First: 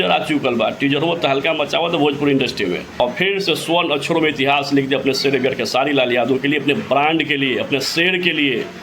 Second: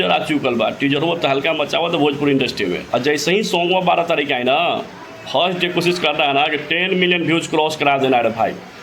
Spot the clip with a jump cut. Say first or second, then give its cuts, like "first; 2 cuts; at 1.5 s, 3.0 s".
first; 1 cut; at 2.8 s